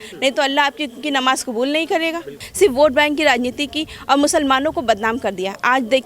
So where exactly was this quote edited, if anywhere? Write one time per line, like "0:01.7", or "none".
0:02.4